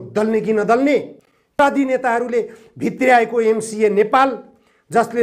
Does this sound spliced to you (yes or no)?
yes